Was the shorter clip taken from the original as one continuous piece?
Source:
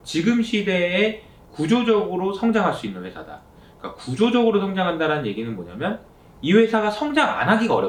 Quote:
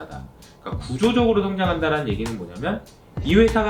yes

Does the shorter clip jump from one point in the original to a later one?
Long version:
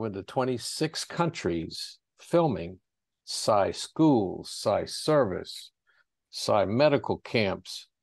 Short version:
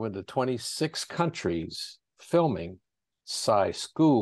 no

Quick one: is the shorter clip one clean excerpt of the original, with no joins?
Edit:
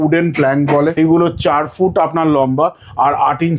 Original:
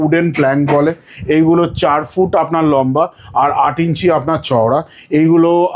no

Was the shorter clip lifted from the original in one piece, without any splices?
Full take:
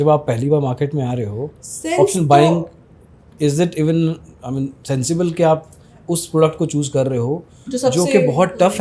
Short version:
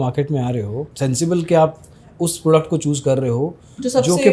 no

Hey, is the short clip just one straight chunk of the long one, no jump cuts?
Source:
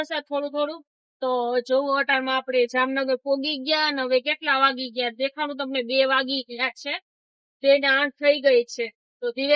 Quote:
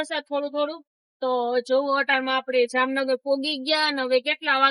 yes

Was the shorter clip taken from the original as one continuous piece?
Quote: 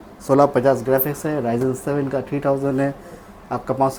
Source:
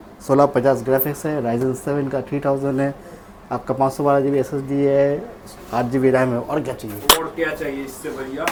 yes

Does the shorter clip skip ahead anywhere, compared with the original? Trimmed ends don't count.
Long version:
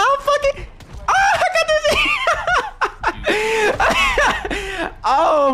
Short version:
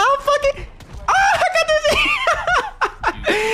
no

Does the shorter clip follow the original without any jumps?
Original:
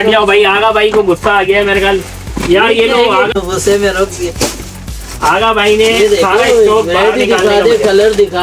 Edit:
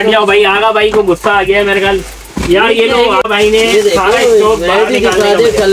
no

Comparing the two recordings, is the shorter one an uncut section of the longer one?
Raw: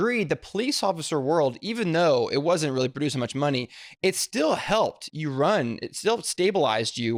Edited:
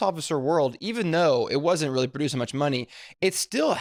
yes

